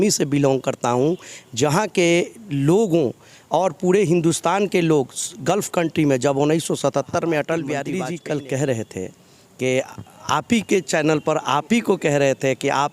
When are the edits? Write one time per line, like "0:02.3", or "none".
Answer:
0:07.9